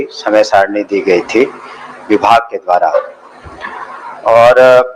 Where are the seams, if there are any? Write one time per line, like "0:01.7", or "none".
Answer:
none